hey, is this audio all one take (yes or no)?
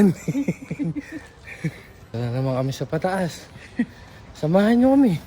no